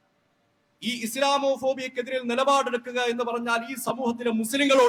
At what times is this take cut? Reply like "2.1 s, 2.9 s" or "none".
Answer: none